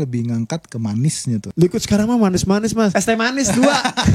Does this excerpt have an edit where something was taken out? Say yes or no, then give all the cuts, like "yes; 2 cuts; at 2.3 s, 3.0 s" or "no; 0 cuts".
yes; 2 cuts; at 1.5 s, 2.9 s